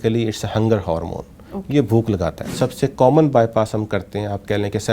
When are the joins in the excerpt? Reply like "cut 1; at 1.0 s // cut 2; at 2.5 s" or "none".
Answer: cut 1; at 2.6 s